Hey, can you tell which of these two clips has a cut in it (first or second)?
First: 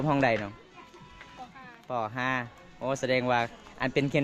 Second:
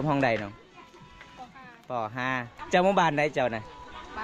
second